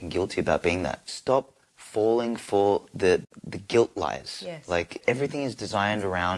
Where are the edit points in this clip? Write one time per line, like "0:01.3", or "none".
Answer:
0:01.1
0:03.3
0:04.9